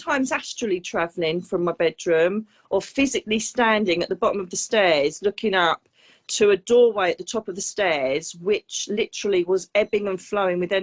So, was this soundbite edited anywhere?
no; 0 cuts

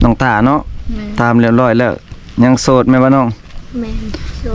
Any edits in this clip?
no; 0 cuts

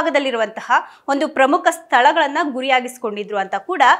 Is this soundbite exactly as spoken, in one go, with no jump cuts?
yes; 0 cuts

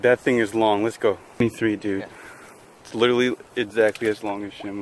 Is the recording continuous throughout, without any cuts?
no; 1 cut; at 1.4 s

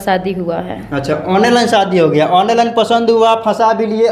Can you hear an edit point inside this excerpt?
no; 0 cuts

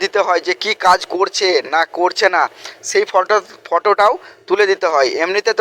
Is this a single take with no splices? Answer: yes; 0 cuts

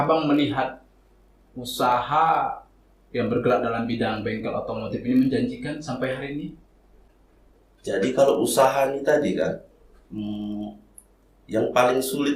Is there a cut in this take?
yes; 1 cut; at 7.1 s

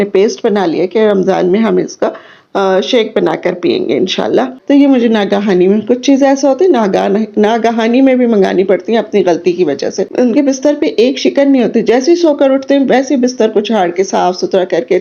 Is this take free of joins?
no; 2 cuts; at 4.6 s, 10.1 s

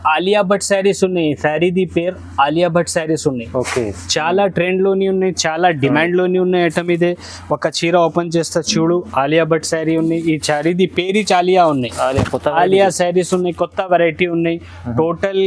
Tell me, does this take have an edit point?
no; 0 cuts

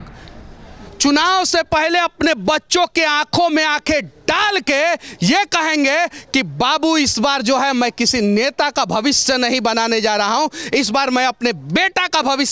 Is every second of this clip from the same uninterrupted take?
yes; 0 cuts

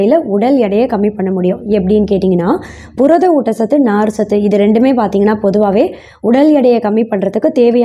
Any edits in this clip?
no; 0 cuts

